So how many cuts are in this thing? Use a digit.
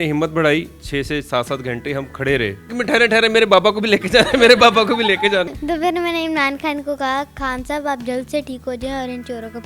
2